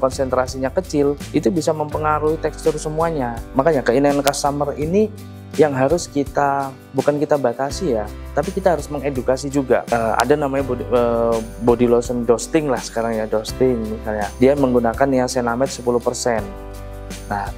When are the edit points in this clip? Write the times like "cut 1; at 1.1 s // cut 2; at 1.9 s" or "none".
cut 1; at 9.9 s